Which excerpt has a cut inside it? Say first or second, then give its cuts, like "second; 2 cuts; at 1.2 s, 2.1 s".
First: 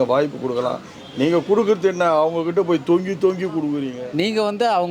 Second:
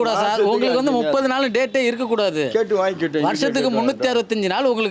first; 1 cut; at 3.9 s